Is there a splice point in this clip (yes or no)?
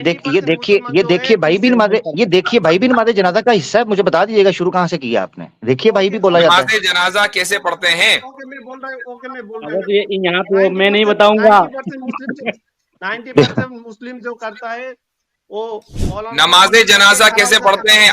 no